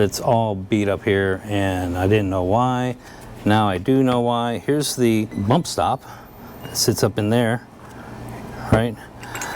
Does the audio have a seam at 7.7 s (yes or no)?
no